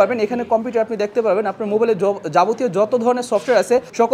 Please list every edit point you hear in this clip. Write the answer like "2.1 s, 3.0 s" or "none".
none

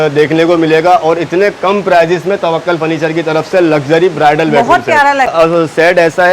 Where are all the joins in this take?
5.3 s

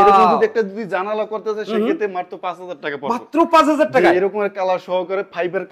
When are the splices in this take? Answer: none

